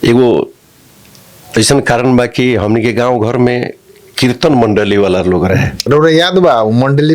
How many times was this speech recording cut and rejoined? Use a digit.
1